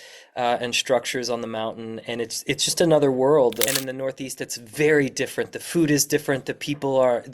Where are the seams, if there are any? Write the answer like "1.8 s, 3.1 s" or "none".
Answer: 3.7 s